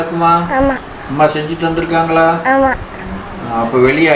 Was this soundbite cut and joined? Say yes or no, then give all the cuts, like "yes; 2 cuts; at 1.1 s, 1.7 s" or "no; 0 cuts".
no; 0 cuts